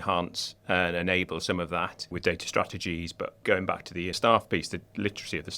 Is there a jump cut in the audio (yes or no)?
yes